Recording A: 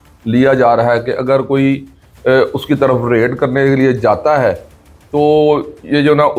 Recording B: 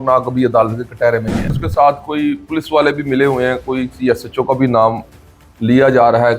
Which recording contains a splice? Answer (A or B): B